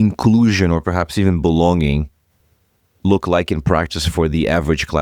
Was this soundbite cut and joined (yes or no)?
no